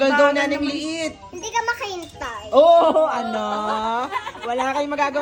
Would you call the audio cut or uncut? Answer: uncut